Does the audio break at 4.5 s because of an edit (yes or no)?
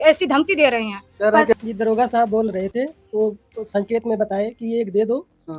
no